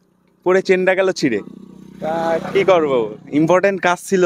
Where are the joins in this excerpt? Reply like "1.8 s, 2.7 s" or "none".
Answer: none